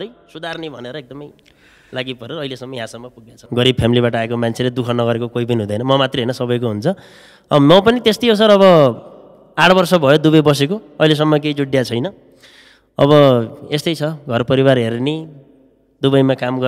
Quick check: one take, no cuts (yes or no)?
no